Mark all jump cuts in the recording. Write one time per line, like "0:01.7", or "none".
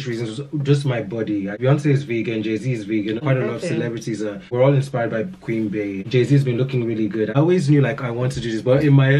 0:01.6
0:03.2
0:04.4
0:06.0
0:07.3